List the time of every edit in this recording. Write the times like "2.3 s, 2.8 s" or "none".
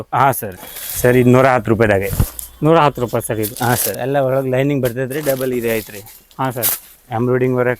3.9 s